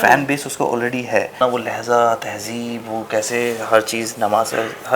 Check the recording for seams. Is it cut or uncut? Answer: cut